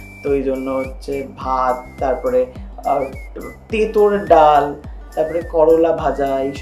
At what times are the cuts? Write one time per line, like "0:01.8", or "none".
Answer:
none